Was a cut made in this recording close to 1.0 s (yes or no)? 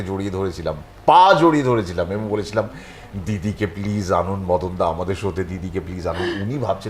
no